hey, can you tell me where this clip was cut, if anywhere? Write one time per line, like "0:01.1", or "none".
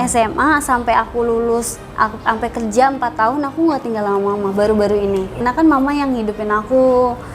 0:05.4